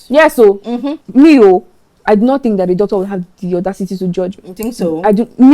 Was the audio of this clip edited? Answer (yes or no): yes